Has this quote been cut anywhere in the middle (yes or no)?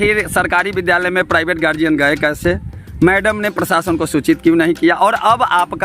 no